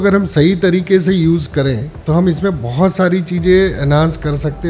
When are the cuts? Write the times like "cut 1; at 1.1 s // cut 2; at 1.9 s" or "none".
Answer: cut 1; at 1.9 s